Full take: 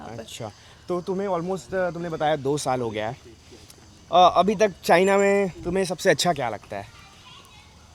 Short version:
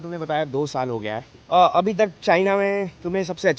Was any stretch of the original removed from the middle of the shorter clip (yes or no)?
yes